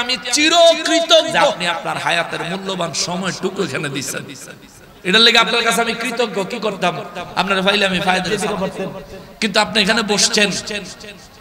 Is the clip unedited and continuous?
no; 2 cuts; at 1.6 s, 8.3 s

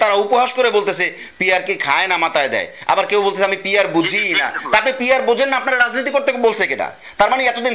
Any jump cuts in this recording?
no; 0 cuts

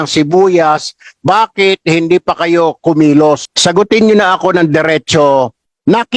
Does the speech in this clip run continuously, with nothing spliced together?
no; 1 cut; at 3.5 s

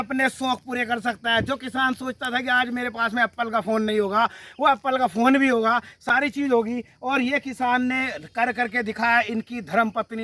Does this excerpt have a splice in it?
no; 0 cuts

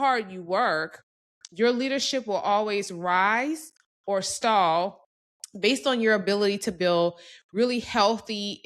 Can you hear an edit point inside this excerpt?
no; 0 cuts

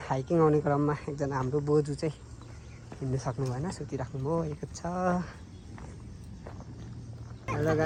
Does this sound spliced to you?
no; 0 cuts

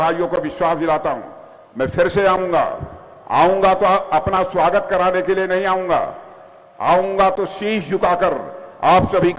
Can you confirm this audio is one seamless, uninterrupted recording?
yes; 0 cuts

